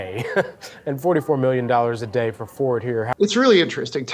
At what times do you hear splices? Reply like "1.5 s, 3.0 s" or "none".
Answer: 3.1 s